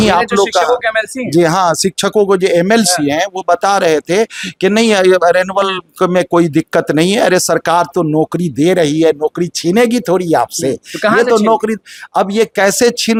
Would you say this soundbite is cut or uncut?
uncut